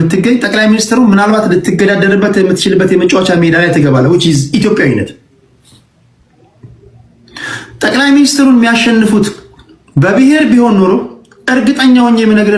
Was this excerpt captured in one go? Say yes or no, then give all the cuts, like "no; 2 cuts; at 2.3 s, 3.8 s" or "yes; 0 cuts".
yes; 0 cuts